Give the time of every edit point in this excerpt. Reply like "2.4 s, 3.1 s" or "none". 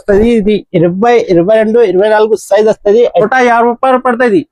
3.2 s